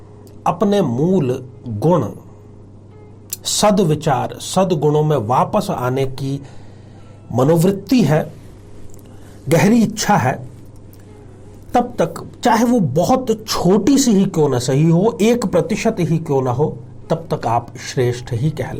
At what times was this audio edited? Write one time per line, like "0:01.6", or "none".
none